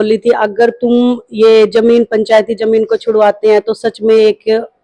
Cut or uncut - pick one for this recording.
uncut